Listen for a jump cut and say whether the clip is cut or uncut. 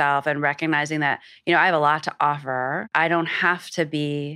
cut